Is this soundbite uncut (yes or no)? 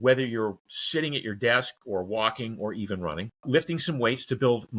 no